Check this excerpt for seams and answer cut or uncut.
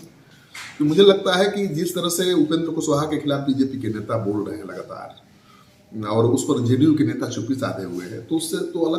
uncut